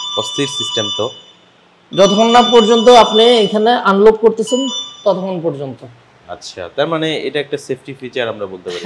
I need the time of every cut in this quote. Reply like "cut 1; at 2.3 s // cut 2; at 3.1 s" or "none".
none